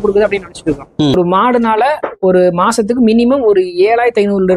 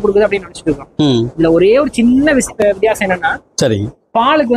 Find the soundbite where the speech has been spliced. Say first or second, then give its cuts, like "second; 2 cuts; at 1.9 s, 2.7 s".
first; 1 cut; at 1.1 s